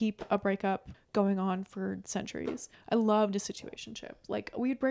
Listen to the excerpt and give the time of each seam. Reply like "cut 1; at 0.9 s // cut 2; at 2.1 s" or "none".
cut 1; at 0.9 s // cut 2; at 2.7 s